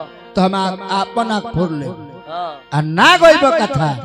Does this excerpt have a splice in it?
no; 0 cuts

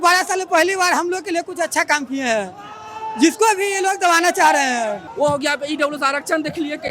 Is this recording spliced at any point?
yes; 1 cut; at 5.0 s

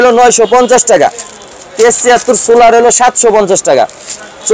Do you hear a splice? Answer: no; 0 cuts

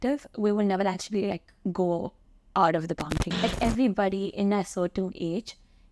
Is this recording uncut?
no; 1 cut; at 3.4 s

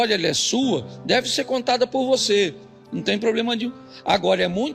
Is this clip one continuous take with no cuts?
yes; 0 cuts

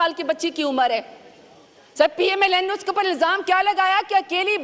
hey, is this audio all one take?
yes; 0 cuts

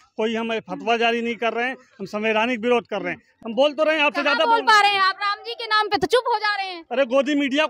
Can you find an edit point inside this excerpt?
yes; 1 cut; at 3.3 s

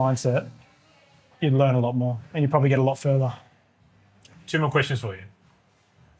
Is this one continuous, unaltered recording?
yes; 0 cuts

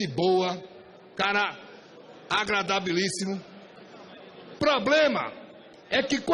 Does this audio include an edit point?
no; 0 cuts

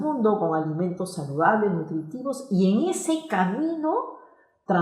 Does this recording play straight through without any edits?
yes; 0 cuts

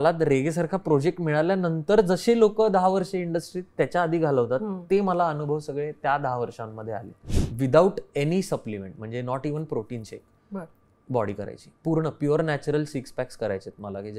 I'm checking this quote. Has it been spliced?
yes; 1 cut; at 7.2 s

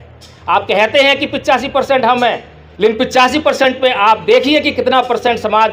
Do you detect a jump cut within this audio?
no; 0 cuts

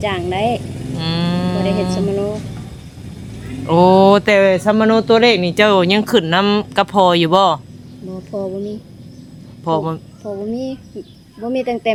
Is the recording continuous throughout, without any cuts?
yes; 0 cuts

